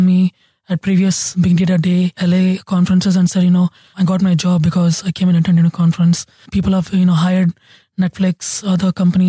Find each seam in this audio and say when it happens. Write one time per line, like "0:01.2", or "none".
0:01.3
0:02.1
0:03.9
0:06.5